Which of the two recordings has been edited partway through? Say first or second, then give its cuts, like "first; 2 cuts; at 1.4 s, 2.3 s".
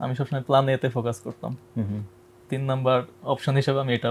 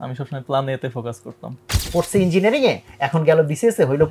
second; 1 cut; at 1.7 s